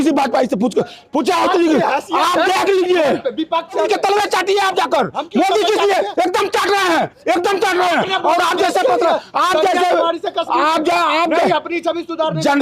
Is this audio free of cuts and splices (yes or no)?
no